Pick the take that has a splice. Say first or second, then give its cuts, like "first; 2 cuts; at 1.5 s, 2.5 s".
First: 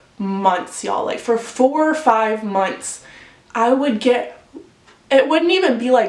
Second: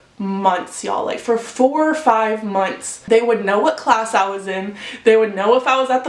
second; 1 cut; at 3.1 s